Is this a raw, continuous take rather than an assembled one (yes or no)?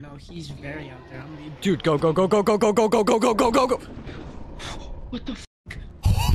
no